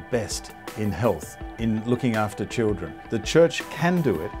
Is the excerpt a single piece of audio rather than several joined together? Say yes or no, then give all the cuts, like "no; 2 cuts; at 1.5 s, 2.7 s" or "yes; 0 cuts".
no; 1 cut; at 2.9 s